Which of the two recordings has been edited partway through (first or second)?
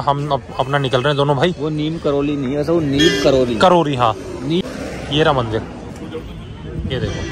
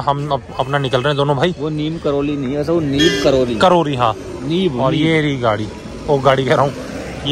first